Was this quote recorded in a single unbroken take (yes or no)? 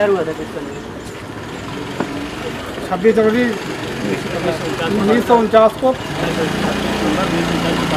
yes